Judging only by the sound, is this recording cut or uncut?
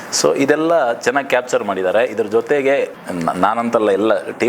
cut